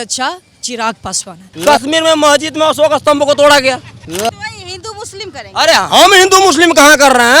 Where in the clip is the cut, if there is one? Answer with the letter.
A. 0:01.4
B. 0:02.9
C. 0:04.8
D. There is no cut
A